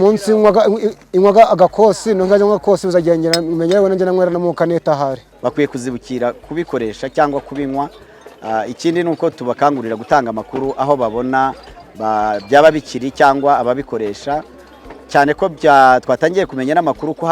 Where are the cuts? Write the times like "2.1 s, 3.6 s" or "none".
5.3 s